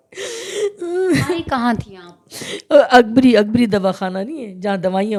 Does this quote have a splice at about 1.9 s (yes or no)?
no